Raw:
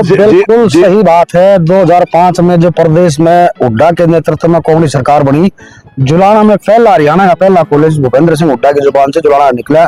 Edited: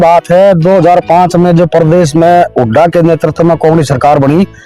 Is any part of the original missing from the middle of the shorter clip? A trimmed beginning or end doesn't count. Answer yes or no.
no